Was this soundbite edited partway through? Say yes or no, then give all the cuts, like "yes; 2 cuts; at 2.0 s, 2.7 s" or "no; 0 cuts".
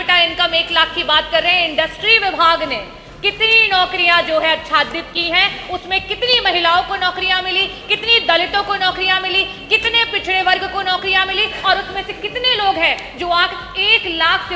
no; 0 cuts